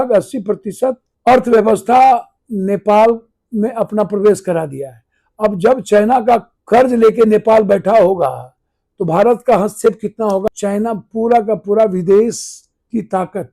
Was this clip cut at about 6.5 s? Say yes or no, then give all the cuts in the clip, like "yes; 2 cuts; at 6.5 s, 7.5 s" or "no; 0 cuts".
yes; 3 cuts; at 1.1 s, 6.5 s, 10.4 s